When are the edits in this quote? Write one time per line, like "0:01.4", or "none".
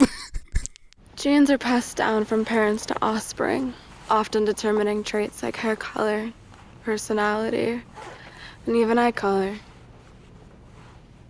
none